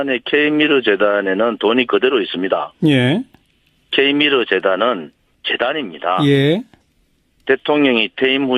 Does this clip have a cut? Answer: yes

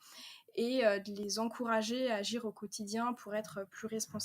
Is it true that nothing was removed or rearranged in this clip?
no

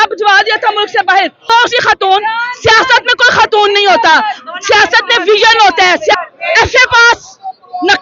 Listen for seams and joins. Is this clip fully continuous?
no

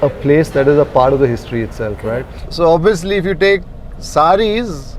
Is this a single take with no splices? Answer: no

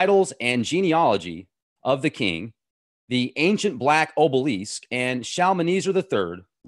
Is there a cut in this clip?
no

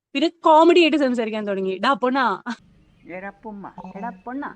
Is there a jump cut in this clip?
yes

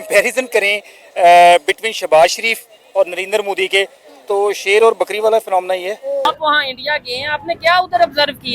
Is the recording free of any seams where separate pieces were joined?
no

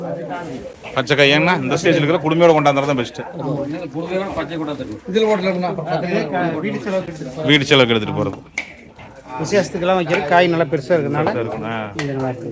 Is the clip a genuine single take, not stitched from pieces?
yes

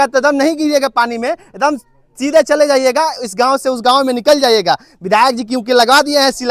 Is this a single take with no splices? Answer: yes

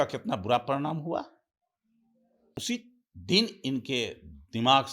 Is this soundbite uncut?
no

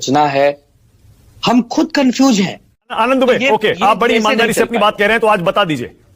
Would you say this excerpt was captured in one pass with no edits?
no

